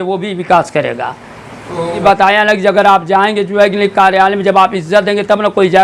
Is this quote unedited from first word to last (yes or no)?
no